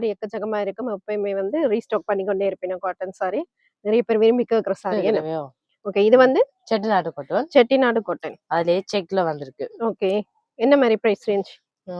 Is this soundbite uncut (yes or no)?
yes